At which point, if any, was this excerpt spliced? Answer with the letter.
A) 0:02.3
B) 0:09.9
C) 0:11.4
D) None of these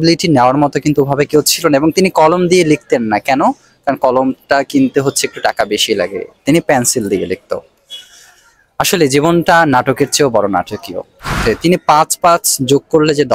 C